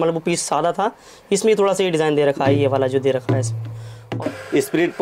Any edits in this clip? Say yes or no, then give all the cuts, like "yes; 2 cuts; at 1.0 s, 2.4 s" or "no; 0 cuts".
yes; 1 cut; at 4.1 s